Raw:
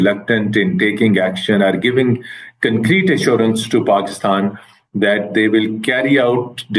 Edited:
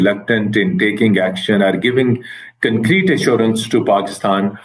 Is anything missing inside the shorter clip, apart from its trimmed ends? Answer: no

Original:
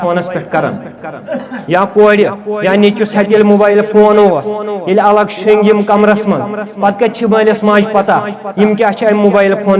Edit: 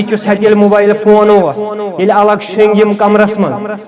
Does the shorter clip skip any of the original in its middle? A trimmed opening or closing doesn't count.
no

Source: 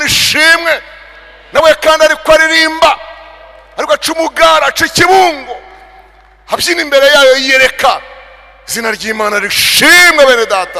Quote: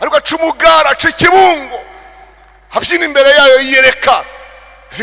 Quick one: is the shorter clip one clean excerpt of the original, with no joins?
yes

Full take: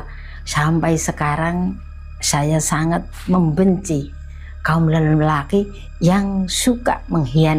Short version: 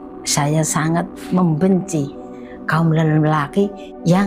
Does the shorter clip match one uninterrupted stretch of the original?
yes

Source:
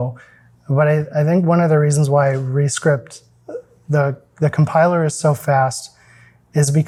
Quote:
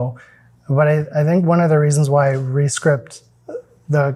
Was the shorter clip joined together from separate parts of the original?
no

